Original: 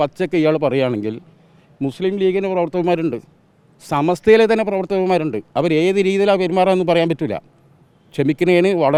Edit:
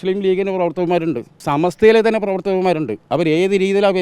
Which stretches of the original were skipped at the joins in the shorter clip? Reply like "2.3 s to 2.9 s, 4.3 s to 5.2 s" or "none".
3.3 s to 3.8 s